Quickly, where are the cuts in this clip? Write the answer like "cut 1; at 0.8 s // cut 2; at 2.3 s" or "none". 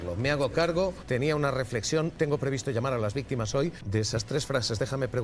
cut 1; at 1.0 s // cut 2; at 2.1 s // cut 3; at 3.8 s